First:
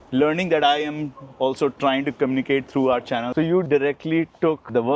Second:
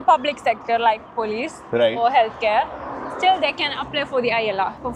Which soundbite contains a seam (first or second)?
first